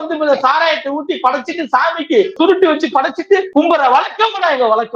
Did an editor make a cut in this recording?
yes; 2 cuts; at 2.4 s, 3.5 s

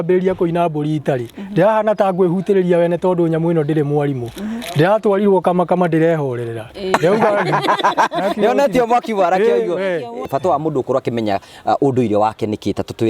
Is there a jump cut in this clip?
yes; 1 cut; at 10.3 s

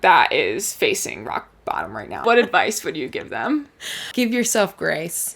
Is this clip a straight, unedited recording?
no; 2 cuts; at 2.2 s, 4.1 s

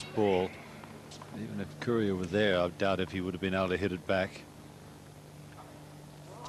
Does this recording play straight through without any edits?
no; 1 cut; at 2.0 s

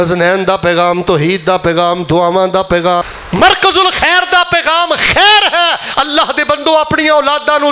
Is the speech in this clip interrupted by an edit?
yes; 1 cut; at 3.0 s

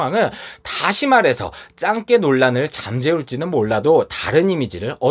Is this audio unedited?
yes; 0 cuts

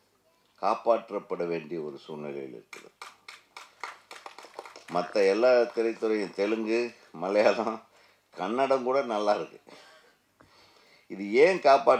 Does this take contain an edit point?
no; 0 cuts

